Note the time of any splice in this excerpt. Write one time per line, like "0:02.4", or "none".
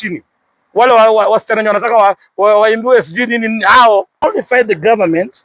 0:04.2